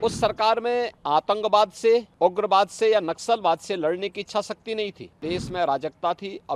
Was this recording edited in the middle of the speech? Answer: yes; 3 cuts; at 1.0 s, 2.1 s, 5.2 s

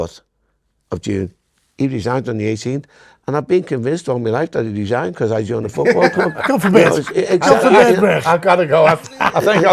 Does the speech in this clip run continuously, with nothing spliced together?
yes; 0 cuts

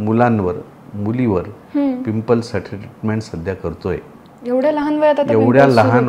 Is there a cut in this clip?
no; 0 cuts

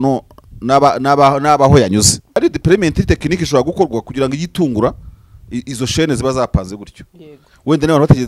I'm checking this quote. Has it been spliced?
yes; 1 cut; at 2.4 s

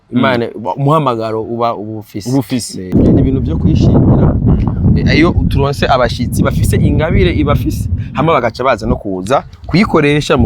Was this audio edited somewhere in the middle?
yes; 1 cut; at 2.9 s

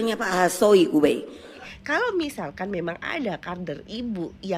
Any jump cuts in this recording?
yes; 1 cut; at 1.7 s

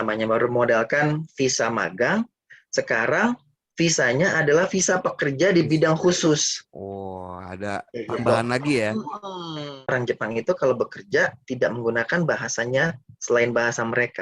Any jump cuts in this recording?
yes; 1 cut; at 9.6 s

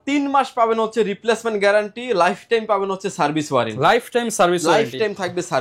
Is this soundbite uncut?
yes; 0 cuts

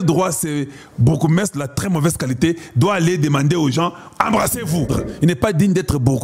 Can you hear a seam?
yes; 1 cut; at 4.9 s

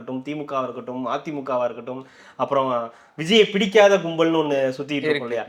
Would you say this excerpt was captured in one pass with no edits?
yes; 0 cuts

